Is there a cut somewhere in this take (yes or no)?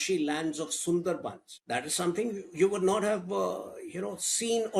yes